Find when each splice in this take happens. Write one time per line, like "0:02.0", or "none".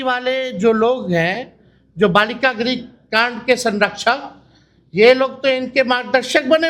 none